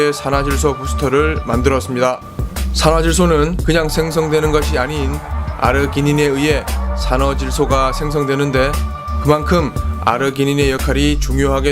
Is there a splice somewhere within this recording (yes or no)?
yes